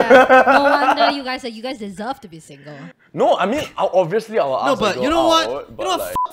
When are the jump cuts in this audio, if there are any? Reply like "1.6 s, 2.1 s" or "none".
2.9 s